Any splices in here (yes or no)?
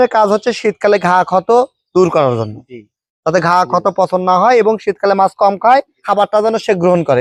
no